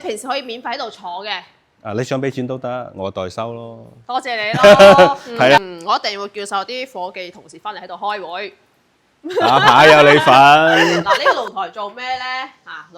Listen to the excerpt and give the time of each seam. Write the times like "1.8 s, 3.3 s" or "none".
5.6 s, 11.5 s